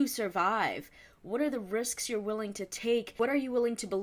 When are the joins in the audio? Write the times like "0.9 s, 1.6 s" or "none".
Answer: 3.1 s